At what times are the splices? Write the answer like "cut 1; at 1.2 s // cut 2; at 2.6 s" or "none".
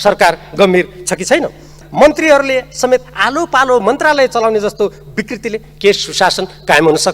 cut 1; at 1.8 s